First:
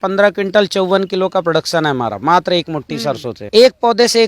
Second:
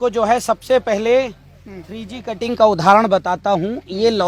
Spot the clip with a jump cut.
first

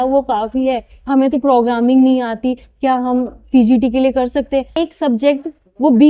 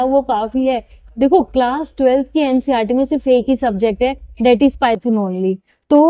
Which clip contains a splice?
first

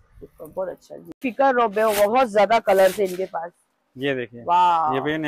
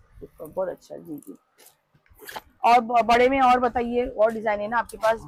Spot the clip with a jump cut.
first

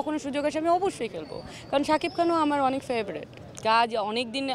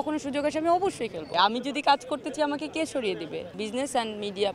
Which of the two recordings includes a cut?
second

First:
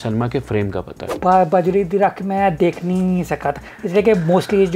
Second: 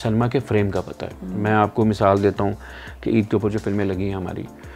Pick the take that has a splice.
first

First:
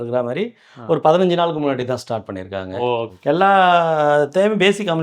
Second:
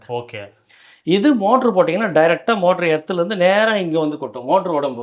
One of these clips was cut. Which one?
first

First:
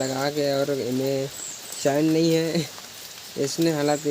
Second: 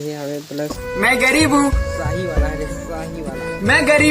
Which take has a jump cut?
second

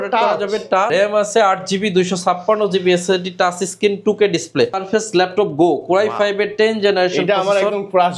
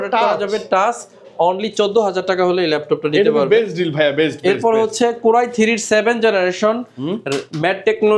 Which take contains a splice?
first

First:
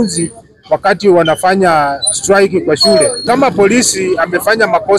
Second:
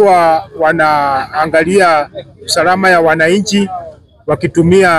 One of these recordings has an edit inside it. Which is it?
first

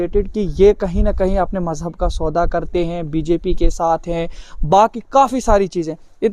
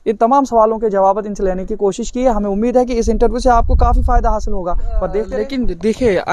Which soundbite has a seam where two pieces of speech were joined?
second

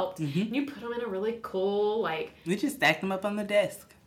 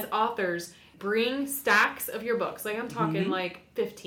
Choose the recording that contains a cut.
second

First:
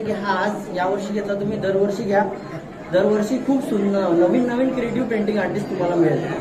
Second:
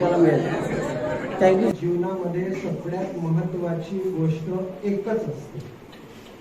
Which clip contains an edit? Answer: second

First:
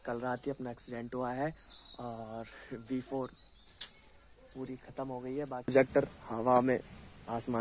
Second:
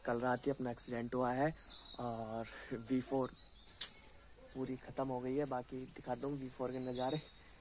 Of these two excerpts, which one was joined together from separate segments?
first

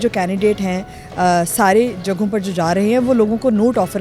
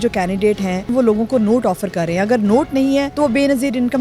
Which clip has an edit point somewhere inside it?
second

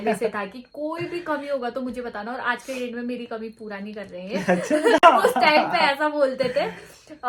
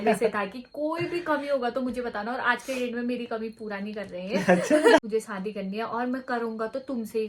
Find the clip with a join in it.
second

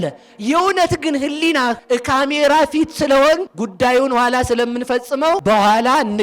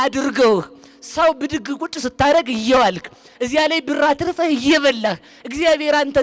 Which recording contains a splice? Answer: first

